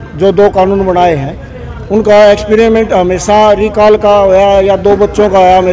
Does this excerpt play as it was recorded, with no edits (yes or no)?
yes